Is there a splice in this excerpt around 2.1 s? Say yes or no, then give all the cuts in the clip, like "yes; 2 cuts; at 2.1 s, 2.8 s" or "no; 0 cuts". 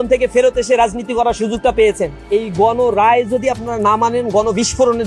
yes; 1 cut; at 2.1 s